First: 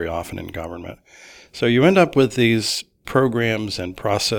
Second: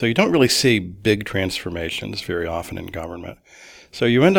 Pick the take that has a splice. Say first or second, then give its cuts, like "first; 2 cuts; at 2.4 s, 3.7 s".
first; 1 cut; at 3.0 s